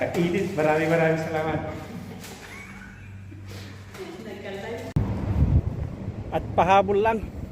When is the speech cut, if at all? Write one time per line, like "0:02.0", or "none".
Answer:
0:04.9